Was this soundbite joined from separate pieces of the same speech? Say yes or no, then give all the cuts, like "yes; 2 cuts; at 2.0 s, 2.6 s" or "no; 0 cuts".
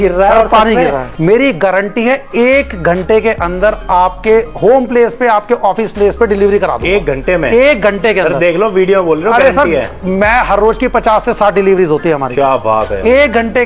yes; 1 cut; at 1.1 s